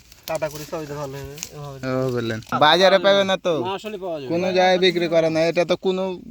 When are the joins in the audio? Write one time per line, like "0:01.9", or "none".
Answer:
0:02.5